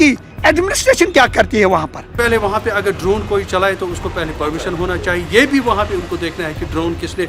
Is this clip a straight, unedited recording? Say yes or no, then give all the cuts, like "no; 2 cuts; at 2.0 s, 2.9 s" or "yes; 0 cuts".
no; 1 cut; at 2.1 s